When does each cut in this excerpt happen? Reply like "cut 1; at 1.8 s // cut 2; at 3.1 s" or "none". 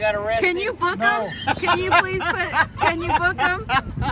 none

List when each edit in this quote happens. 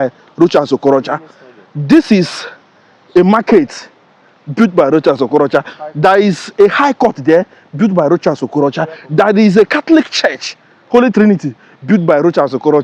none

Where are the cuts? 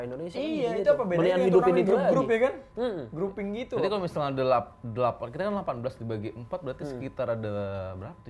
none

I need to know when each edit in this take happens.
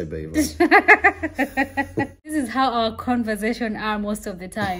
cut 1; at 2.3 s

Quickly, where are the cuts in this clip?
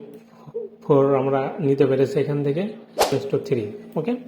cut 1; at 3.1 s

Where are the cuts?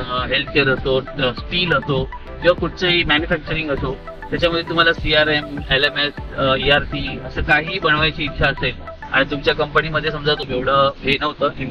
cut 1; at 10.5 s

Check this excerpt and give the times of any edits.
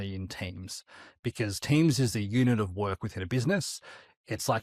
none

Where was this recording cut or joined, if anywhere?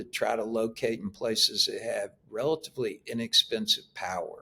none

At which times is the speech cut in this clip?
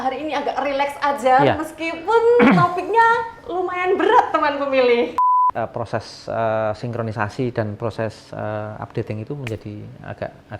cut 1; at 5.2 s

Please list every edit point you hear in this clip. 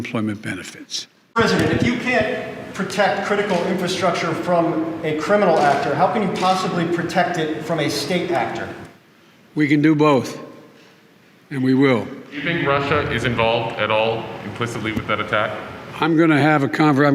cut 1; at 1.3 s

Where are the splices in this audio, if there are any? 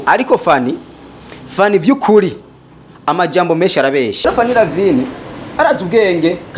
cut 1; at 4.3 s

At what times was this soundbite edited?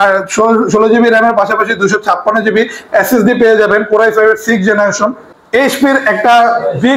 cut 1; at 5.3 s

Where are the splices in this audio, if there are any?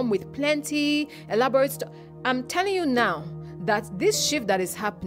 none

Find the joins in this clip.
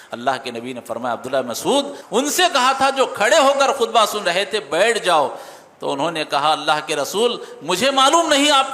cut 1; at 2.0 s

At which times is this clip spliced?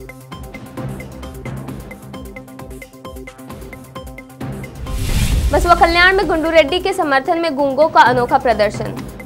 none

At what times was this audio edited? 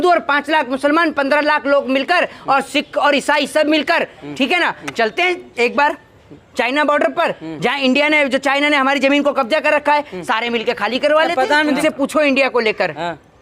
cut 1; at 11.6 s

